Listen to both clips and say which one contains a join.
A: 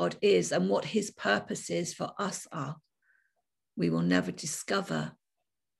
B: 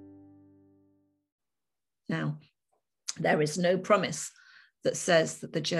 B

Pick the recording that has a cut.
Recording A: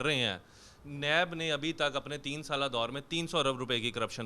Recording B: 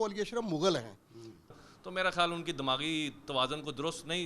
B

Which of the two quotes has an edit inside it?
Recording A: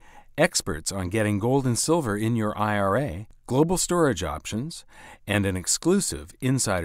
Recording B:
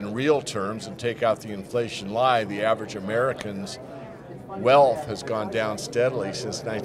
B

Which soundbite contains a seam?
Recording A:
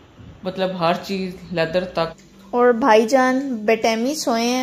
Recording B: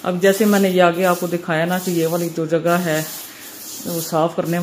A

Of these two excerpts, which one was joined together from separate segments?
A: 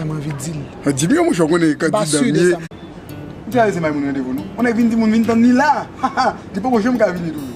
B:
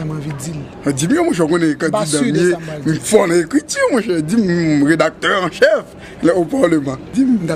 B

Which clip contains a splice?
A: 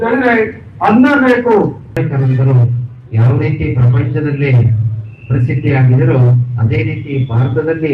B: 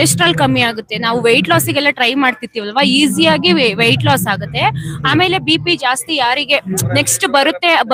A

